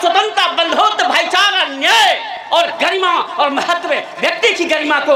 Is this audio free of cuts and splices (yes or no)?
yes